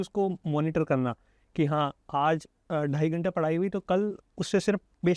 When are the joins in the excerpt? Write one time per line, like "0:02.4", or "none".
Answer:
none